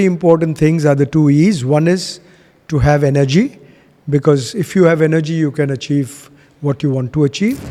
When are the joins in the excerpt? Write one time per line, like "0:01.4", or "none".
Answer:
none